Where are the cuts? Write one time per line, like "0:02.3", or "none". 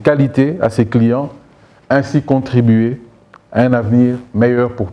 none